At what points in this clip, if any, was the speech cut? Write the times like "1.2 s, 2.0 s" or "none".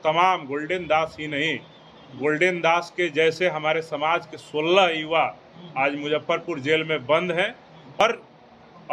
8.0 s